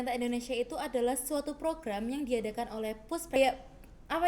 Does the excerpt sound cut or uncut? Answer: cut